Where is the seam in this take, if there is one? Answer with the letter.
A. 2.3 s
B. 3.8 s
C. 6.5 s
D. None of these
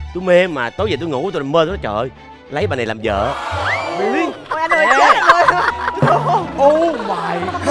D